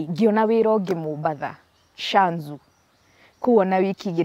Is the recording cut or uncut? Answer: uncut